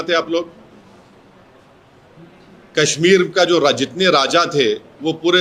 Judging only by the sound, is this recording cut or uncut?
uncut